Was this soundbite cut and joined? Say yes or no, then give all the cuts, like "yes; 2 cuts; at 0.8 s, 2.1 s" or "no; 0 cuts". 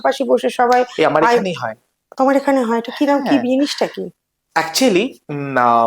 no; 0 cuts